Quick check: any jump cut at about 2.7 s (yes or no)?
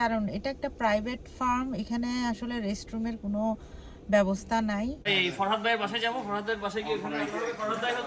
no